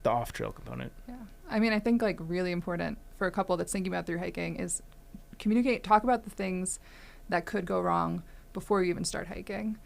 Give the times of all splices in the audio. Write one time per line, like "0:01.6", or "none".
0:03.0